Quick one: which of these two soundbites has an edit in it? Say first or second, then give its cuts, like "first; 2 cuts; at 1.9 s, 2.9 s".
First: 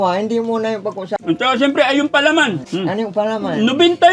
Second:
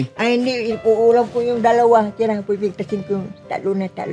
first; 2 cuts; at 1.1 s, 2.6 s